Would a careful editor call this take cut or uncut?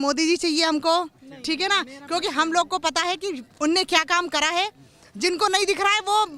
uncut